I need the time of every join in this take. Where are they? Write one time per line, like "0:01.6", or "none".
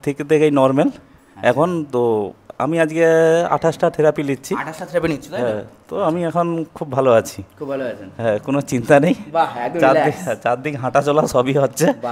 none